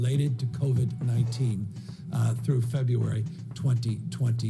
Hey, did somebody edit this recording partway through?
no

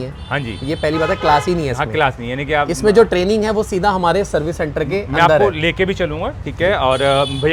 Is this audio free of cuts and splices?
yes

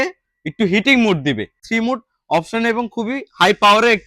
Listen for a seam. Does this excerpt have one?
yes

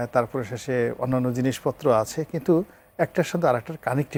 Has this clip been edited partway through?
no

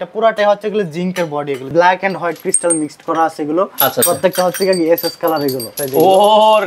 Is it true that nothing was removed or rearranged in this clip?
no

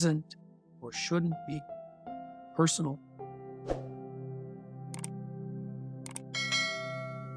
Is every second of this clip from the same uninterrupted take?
yes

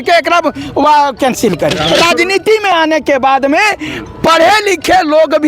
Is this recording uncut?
no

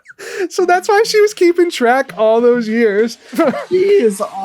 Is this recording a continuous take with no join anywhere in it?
no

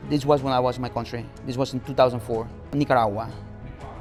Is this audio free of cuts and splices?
yes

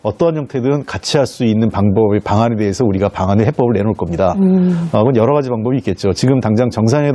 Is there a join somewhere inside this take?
yes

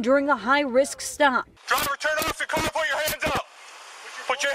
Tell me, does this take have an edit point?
yes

